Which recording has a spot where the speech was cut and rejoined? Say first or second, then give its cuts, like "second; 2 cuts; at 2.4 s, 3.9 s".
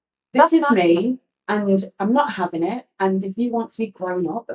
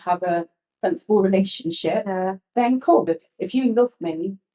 second; 1 cut; at 3.1 s